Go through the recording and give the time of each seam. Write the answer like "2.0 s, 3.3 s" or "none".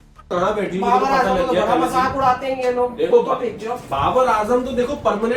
none